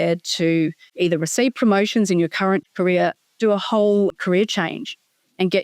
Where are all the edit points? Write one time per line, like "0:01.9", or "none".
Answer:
0:00.9
0:02.6
0:04.1